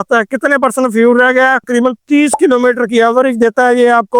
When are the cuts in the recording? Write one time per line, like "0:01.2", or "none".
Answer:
0:01.6